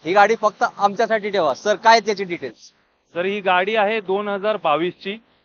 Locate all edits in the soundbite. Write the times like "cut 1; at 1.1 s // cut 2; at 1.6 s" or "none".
none